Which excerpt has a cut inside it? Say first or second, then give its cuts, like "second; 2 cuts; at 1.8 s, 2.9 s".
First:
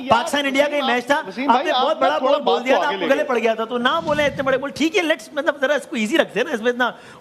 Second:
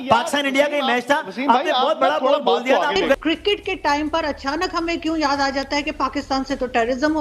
second; 1 cut; at 3.2 s